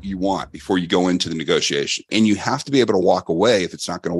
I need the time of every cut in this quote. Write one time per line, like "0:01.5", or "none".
0:02.1